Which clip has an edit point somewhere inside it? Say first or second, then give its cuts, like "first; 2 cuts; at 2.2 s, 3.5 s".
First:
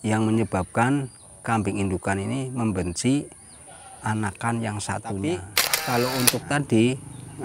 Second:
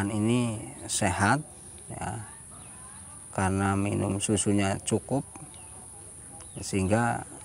first; 1 cut; at 5.2 s